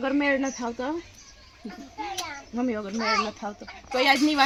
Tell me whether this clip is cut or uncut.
uncut